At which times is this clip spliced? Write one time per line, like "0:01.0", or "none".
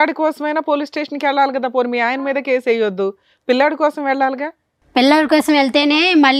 none

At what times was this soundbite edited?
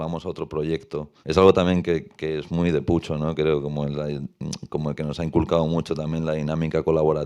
0:01.1

